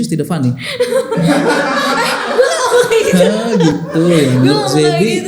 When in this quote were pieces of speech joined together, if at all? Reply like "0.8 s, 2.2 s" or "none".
none